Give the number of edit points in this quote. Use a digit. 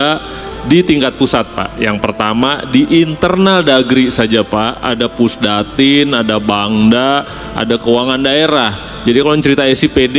0